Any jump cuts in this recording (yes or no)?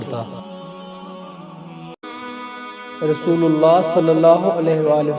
yes